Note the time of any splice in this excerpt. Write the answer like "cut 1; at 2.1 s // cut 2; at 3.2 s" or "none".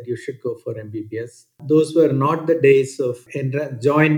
cut 1; at 1.6 s // cut 2; at 3.2 s